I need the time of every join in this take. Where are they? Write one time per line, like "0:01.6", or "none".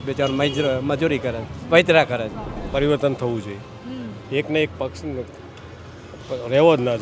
0:02.5